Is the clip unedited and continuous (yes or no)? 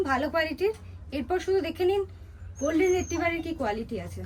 yes